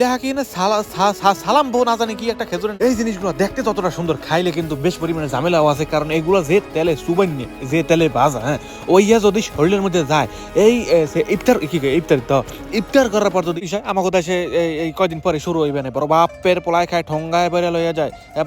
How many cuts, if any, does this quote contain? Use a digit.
2